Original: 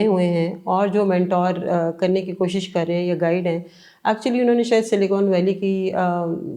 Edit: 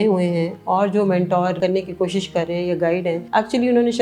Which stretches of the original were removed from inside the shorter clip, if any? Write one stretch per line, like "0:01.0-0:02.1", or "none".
0:01.6-0:02.0
0:03.6-0:03.9